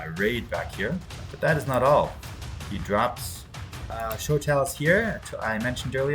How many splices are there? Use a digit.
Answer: 1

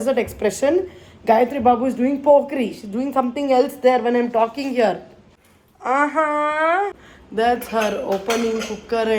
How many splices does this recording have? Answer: 0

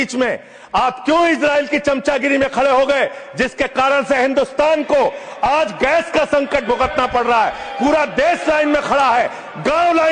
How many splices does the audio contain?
0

